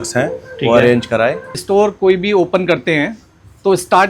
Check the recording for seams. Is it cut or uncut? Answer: cut